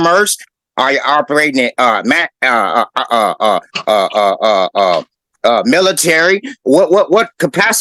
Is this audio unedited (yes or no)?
yes